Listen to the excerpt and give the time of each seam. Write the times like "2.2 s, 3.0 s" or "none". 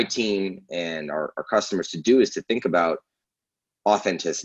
none

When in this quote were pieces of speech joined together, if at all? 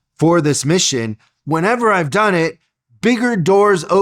1.1 s

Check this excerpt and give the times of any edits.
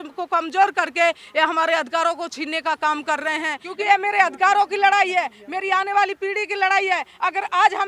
3.6 s

